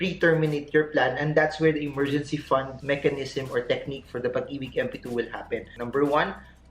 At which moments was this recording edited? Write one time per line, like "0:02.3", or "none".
0:02.7
0:05.7